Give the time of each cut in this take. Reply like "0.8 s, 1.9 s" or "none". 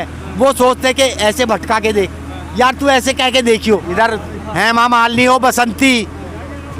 3.9 s